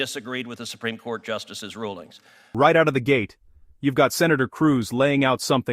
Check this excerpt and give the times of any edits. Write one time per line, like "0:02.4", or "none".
0:02.5